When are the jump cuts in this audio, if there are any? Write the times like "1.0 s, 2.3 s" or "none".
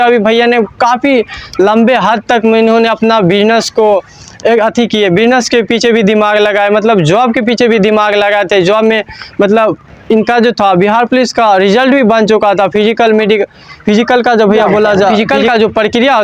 15.1 s